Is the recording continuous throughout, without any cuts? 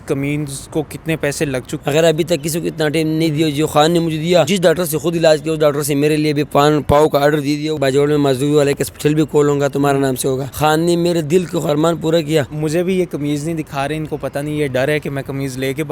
no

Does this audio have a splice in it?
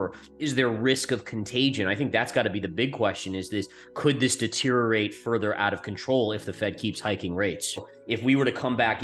yes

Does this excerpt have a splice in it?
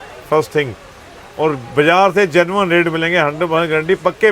no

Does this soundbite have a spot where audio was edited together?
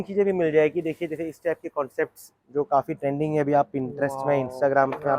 no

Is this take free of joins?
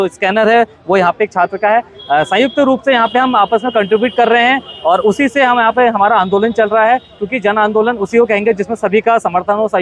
yes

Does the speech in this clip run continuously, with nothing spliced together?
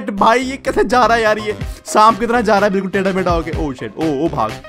yes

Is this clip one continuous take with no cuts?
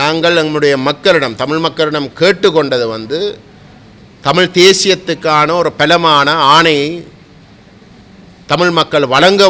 yes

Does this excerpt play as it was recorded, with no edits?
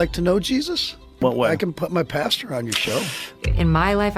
no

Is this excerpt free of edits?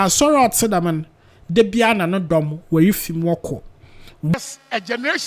no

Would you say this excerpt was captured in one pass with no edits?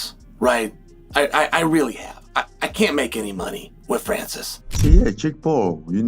no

